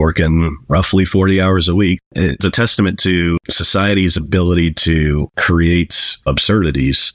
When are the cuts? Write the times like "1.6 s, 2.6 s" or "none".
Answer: 2.0 s, 3.5 s, 5.3 s

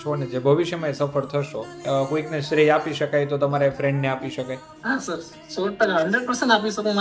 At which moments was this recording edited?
1.8 s, 4.7 s

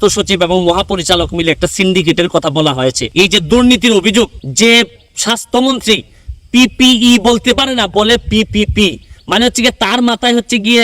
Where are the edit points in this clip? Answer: 3.0 s, 4.4 s

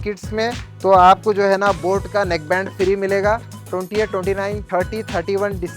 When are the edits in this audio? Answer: 3.6 s, 4.6 s

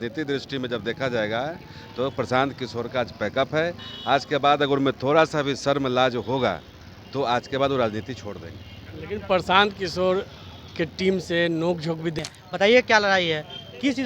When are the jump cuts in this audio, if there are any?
12.1 s

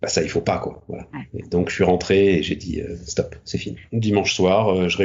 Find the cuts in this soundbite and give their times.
3.9 s

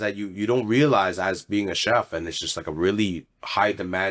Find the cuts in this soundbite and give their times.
none

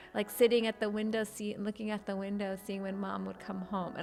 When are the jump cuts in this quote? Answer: none

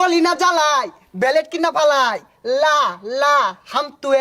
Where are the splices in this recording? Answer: none

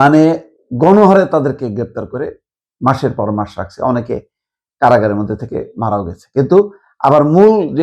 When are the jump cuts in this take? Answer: none

